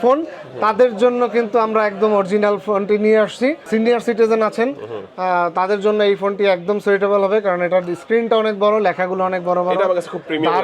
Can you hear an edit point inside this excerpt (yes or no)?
yes